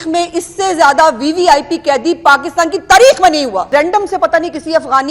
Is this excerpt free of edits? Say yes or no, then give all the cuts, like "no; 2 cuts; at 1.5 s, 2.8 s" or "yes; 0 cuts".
no; 1 cut; at 3.7 s